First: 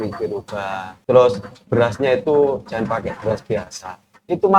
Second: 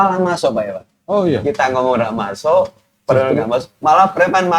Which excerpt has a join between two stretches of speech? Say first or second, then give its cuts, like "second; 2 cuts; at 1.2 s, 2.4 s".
first; 1 cut; at 0.9 s